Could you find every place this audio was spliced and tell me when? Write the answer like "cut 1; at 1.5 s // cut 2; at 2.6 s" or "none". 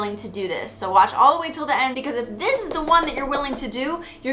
cut 1; at 2.0 s